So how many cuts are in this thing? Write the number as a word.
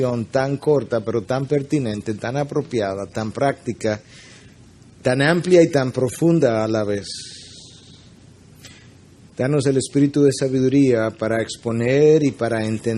one